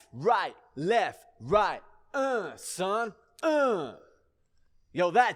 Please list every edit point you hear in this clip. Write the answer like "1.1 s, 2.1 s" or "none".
none